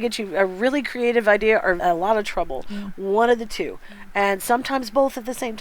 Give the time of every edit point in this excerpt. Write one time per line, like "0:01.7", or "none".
0:01.8